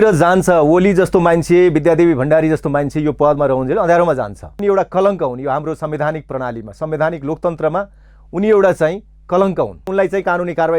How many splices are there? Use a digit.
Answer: 2